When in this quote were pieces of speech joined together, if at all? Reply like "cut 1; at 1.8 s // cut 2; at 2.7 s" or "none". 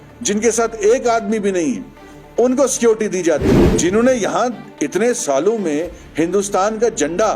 cut 1; at 3.6 s